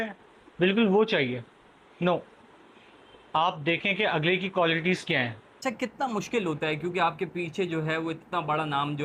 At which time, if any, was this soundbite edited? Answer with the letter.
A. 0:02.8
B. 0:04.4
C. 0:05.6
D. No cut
C